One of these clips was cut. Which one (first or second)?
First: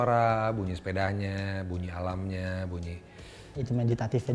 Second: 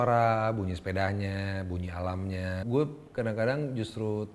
second